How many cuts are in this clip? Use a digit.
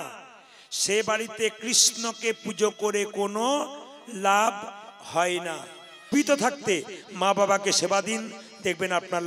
1